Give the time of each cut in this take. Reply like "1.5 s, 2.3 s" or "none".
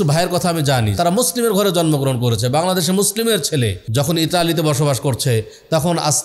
0.9 s, 3.8 s